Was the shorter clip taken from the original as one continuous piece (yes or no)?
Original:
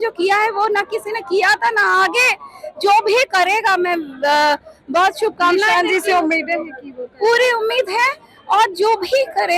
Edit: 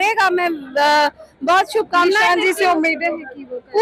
yes